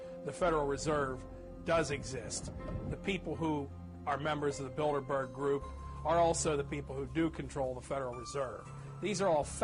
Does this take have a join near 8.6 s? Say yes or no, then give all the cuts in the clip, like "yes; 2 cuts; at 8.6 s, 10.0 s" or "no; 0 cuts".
no; 1 cut; at 4.2 s